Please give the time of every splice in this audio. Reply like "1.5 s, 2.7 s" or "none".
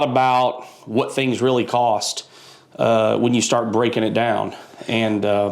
none